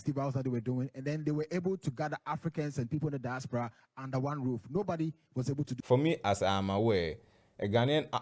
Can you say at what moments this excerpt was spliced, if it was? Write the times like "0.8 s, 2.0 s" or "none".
5.7 s